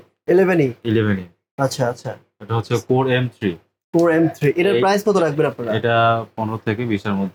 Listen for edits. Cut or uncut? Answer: uncut